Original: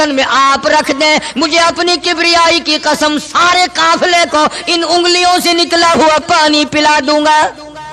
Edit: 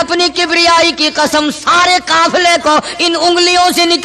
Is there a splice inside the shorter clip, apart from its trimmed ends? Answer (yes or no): no